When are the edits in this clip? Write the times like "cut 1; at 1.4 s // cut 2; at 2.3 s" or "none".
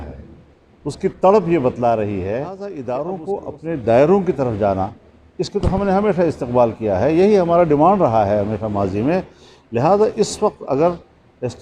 cut 1; at 2.8 s